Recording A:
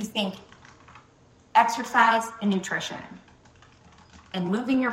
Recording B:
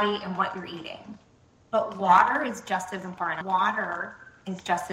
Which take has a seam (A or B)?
B